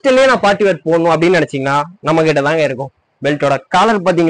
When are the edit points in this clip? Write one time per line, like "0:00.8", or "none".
none